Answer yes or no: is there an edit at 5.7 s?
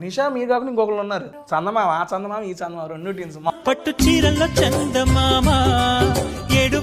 no